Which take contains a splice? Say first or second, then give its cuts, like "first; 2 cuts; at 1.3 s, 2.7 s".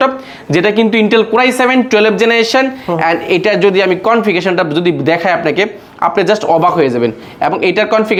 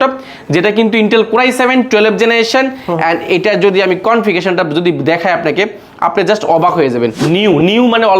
second; 1 cut; at 7.2 s